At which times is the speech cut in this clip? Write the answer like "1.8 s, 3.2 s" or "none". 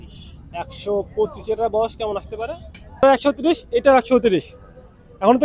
3.0 s